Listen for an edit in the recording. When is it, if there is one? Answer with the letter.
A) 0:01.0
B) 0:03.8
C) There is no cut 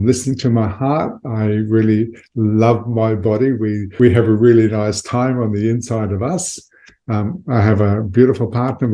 B